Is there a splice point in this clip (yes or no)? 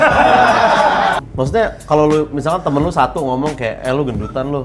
yes